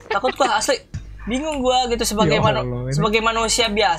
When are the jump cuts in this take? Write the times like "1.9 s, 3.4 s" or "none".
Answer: 1.0 s